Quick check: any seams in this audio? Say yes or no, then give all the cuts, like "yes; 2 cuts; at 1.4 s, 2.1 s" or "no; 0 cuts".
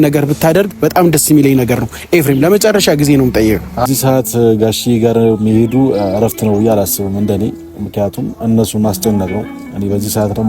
yes; 1 cut; at 3.9 s